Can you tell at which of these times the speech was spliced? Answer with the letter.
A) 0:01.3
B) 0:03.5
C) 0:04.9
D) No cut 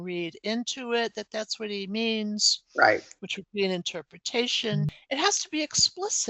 C